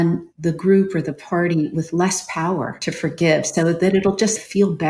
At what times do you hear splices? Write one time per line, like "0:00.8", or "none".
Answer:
0:02.8